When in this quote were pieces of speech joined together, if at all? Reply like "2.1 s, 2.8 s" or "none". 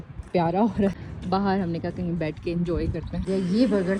1.0 s, 3.2 s